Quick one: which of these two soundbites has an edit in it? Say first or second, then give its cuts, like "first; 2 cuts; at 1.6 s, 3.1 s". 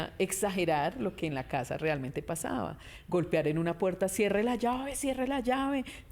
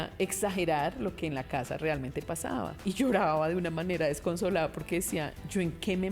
second; 1 cut; at 2.8 s